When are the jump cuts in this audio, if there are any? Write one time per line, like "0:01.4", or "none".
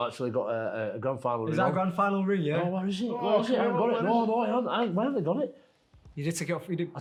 none

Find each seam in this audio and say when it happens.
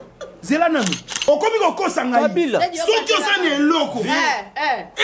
0:01.1

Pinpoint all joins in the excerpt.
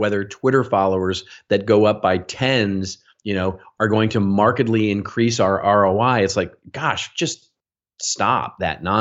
none

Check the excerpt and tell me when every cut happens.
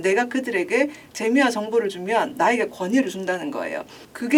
none

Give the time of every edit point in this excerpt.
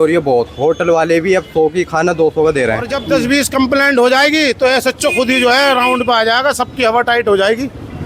0:03.0

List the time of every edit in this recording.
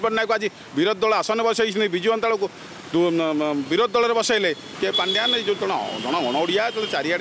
0:04.7

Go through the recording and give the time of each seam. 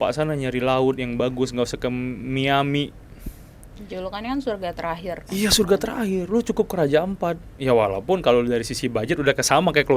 none

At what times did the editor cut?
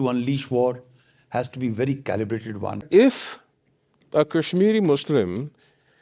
0:02.8

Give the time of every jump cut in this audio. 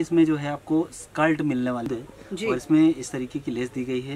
0:01.9

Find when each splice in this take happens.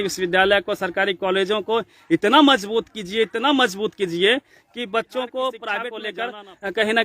0:06.0

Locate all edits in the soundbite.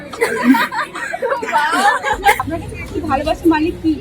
0:02.4

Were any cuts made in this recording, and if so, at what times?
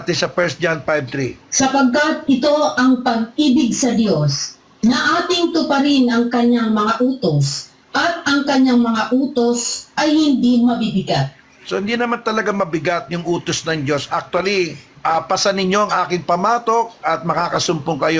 0:01.4
0:14.8

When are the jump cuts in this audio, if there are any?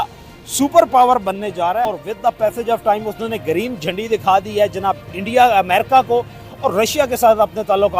0:01.8

